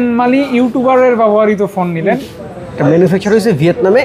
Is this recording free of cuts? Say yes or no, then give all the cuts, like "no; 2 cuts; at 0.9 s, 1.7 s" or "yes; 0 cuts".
no; 1 cut; at 2.2 s